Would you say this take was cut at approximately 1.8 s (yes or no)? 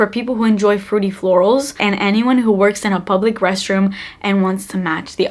yes